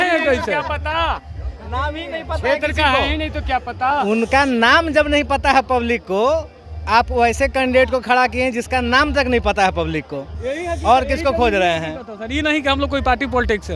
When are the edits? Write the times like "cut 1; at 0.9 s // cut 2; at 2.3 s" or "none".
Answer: none